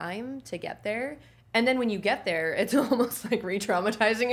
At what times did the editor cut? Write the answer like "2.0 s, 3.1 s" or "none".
none